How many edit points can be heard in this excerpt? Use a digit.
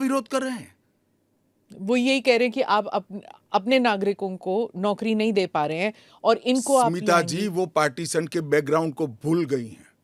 0